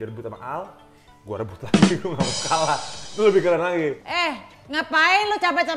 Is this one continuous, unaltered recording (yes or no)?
no